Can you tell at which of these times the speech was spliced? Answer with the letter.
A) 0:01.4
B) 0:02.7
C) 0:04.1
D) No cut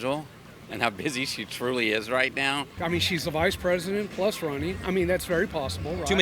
B